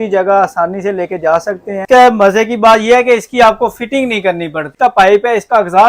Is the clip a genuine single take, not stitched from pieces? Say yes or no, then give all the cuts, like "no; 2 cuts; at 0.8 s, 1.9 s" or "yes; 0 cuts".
no; 2 cuts; at 1.8 s, 4.7 s